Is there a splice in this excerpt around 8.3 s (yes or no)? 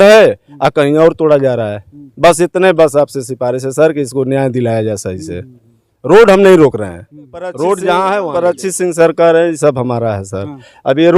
yes